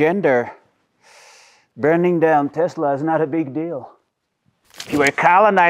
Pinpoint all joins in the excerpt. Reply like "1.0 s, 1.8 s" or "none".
4.7 s